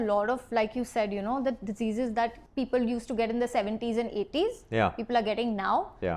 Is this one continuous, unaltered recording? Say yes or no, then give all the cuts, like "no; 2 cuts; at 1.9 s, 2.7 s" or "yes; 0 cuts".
no; 1 cut; at 2.4 s